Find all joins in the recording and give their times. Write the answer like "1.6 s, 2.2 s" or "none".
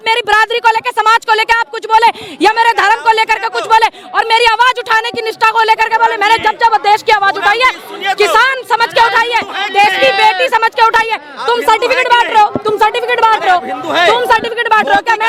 none